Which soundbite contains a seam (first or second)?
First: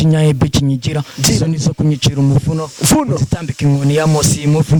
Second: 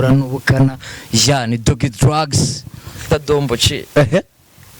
second